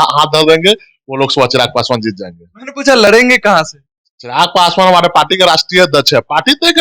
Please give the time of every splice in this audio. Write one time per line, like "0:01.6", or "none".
none